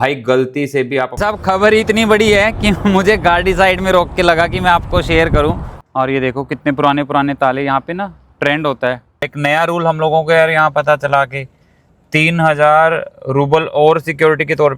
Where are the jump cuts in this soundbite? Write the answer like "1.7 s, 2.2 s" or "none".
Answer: 1.1 s, 5.7 s, 9.3 s